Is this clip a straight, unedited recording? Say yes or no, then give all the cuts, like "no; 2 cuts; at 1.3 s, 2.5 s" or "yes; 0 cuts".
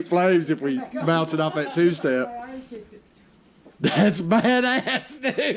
yes; 0 cuts